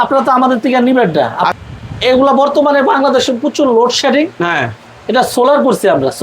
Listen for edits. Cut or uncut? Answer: cut